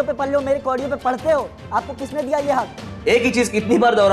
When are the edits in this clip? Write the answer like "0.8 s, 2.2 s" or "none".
2.8 s

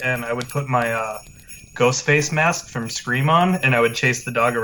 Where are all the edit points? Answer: none

